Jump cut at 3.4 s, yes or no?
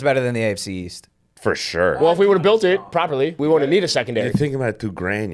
yes